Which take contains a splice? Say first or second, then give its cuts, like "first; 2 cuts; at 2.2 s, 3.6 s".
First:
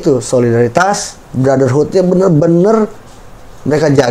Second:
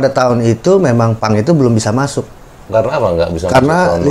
second; 1 cut; at 2.6 s